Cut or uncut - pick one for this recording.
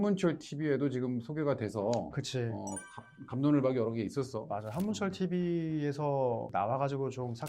uncut